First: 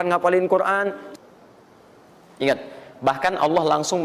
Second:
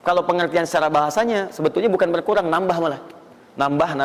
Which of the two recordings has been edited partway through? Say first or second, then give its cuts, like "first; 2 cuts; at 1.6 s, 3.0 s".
first; 1 cut; at 1.0 s